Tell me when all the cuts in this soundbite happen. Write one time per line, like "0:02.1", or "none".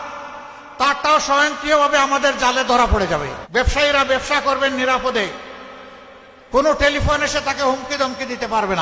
0:03.4